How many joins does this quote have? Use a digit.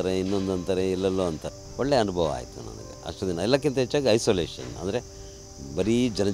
1